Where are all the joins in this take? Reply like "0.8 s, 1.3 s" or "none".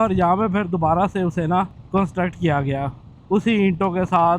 1.8 s